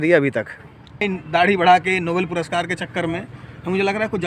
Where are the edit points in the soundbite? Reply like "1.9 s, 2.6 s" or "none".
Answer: 1.0 s